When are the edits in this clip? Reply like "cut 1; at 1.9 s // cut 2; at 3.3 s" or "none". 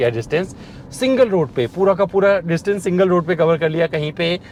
none